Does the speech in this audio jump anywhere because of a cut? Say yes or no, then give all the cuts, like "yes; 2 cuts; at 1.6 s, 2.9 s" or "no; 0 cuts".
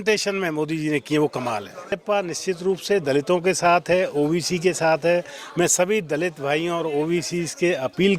yes; 1 cut; at 1.9 s